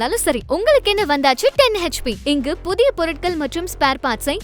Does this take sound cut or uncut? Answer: uncut